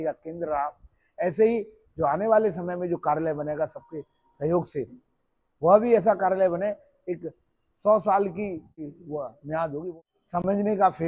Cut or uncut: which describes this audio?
cut